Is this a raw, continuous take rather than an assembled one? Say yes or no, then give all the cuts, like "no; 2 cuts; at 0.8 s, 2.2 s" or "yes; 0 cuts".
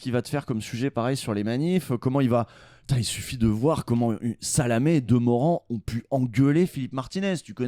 yes; 0 cuts